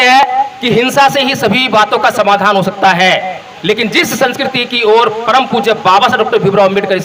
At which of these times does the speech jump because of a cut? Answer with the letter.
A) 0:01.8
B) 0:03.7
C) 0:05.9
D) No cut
D